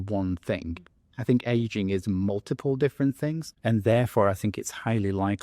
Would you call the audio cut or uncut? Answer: cut